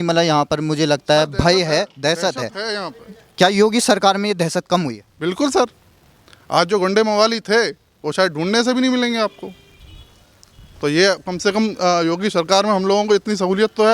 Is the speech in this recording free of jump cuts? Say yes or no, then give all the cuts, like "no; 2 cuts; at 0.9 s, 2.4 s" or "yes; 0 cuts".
yes; 0 cuts